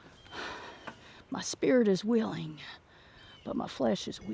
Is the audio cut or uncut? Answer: uncut